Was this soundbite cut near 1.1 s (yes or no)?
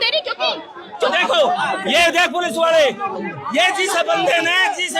yes